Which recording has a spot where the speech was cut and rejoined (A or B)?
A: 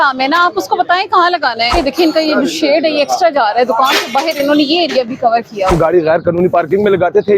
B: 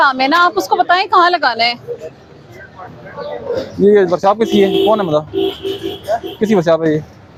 A